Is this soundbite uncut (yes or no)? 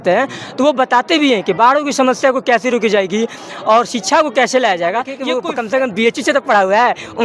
no